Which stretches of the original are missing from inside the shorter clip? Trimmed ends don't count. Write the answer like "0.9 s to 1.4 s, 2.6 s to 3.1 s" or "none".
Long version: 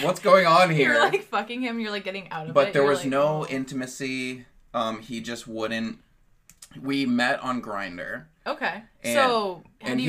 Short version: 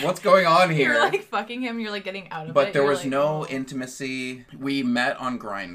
4.4 s to 6.7 s

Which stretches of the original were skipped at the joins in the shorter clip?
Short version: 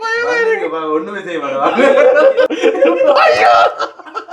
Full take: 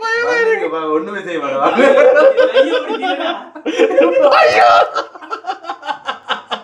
2.5 s to 3.7 s

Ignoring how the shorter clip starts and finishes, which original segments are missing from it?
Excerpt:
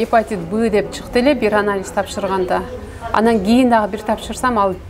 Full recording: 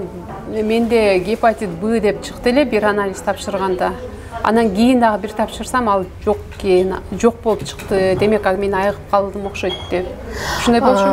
none

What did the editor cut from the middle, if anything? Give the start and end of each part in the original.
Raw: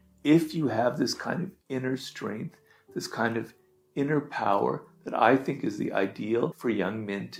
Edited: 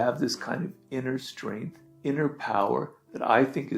2.6 s to 3.7 s

